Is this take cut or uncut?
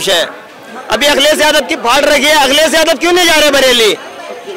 uncut